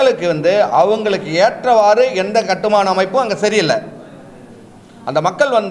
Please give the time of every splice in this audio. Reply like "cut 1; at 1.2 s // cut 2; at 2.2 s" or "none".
none